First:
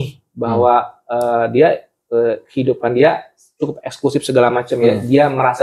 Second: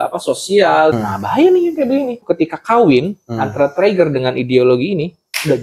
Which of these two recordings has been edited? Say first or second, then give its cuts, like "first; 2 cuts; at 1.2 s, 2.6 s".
second; 2 cuts; at 1.0 s, 2.2 s